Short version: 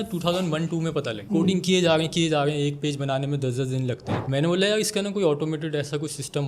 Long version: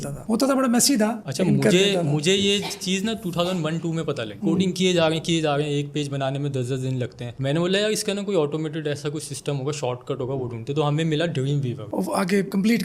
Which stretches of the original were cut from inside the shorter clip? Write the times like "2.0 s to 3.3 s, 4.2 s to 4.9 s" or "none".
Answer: none